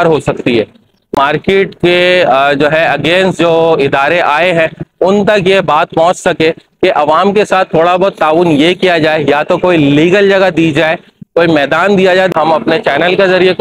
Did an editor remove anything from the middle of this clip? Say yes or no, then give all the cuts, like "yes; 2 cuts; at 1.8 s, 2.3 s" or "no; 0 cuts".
yes; 2 cuts; at 1.2 s, 12.3 s